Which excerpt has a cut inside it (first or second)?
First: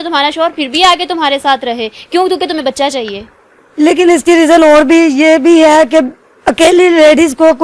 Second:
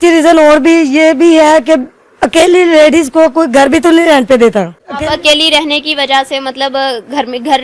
second